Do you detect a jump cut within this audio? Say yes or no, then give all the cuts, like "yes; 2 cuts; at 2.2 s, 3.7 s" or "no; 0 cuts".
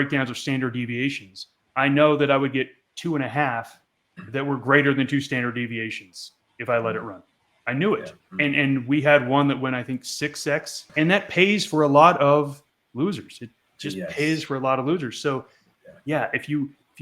yes; 1 cut; at 10.8 s